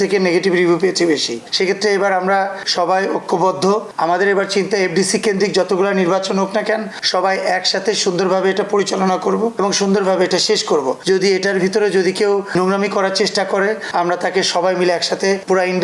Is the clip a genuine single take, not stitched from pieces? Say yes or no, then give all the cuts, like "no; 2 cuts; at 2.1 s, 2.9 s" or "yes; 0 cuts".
yes; 0 cuts